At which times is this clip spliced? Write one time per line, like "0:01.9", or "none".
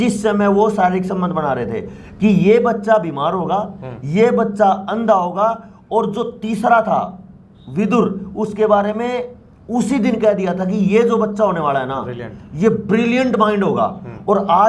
none